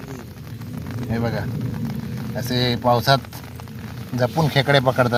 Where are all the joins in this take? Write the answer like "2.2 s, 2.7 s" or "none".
none